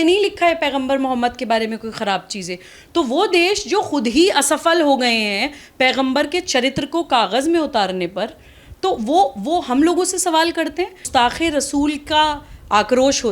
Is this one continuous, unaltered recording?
no; 1 cut; at 11.1 s

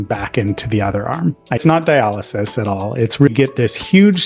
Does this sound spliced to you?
yes; 2 cuts; at 1.6 s, 3.3 s

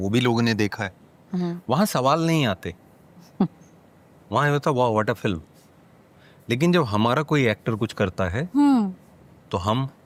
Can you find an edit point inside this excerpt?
no; 0 cuts

